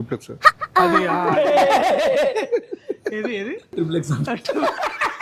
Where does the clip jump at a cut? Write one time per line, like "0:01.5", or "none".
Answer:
0:03.7